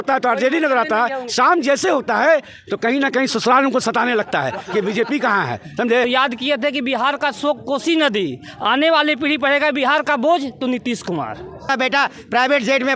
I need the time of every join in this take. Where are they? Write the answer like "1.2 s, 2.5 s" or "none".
6.0 s, 11.7 s